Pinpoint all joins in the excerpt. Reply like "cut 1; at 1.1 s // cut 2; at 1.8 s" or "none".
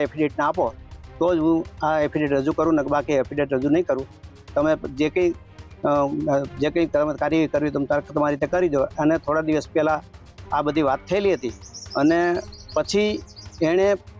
none